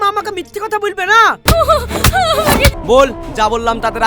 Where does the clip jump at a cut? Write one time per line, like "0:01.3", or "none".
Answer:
0:01.4
0:02.8